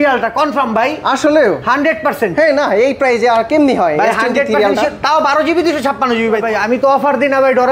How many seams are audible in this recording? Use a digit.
1